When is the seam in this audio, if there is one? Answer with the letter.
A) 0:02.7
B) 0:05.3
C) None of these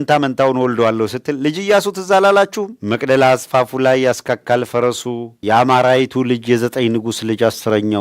B